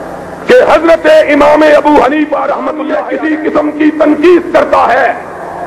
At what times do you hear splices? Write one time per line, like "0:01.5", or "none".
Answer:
0:02.8